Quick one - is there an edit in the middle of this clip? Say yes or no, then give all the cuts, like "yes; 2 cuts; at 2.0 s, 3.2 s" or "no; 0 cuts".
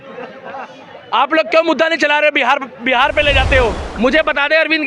yes; 1 cut; at 3.8 s